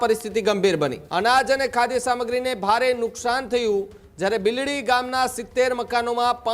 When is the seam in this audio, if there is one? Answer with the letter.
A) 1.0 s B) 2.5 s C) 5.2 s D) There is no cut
A